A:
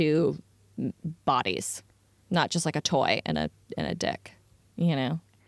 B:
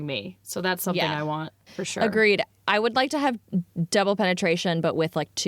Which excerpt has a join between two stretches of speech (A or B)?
B